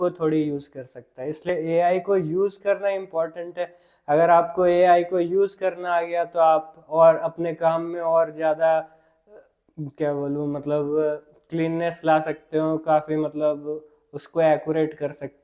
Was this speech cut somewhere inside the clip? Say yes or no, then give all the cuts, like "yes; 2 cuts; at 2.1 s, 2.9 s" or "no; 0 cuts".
no; 0 cuts